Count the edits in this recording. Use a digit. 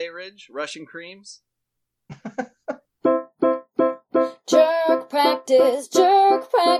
1